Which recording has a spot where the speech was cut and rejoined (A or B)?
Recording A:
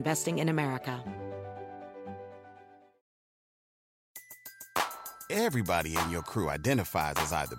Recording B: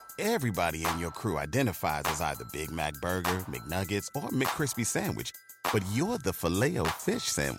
A